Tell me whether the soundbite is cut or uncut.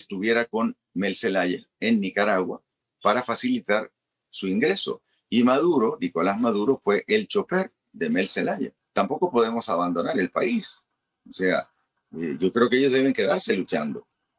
cut